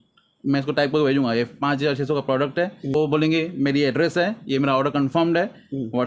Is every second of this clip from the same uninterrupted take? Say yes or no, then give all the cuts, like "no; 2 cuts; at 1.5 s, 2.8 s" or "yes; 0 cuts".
no; 1 cut; at 2.9 s